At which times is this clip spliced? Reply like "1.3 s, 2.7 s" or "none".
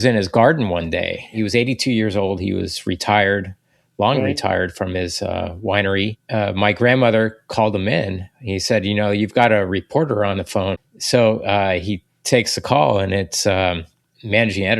1.3 s